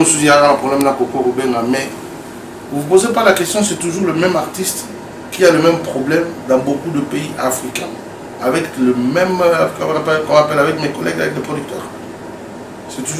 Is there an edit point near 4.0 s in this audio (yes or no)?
no